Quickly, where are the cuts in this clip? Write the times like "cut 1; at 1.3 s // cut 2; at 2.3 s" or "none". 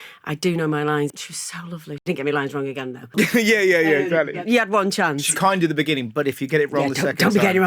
cut 1; at 1.6 s // cut 2; at 3.1 s // cut 3; at 4.4 s